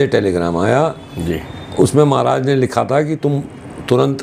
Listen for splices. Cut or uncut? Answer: uncut